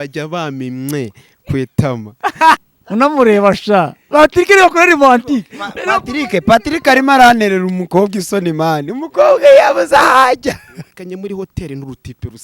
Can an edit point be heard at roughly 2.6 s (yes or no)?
yes